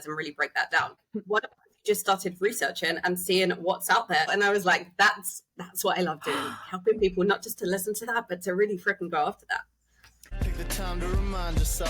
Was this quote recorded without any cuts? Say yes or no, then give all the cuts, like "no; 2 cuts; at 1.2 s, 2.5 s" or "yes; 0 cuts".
no; 3 cuts; at 1.1 s, 4.3 s, 10.2 s